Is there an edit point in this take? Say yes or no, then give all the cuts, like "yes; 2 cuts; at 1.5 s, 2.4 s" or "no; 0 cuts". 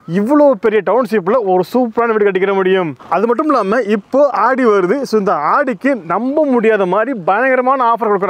no; 0 cuts